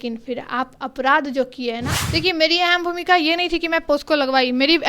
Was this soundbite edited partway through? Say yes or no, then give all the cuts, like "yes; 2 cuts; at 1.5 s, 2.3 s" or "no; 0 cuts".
yes; 1 cut; at 2.0 s